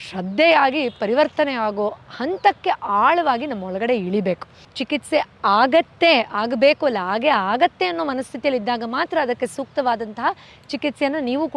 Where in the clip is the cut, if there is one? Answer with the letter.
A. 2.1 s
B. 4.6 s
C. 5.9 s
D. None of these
B